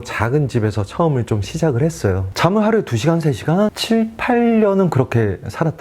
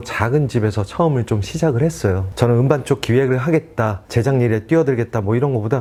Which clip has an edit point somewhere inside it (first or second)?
first